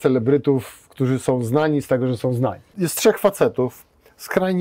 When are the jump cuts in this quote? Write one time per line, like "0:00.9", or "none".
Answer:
0:02.7